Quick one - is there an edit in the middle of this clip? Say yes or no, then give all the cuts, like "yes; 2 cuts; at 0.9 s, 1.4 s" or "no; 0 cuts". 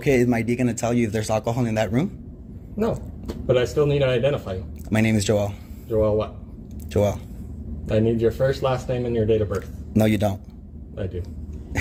no; 0 cuts